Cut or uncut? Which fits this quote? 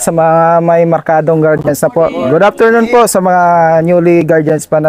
uncut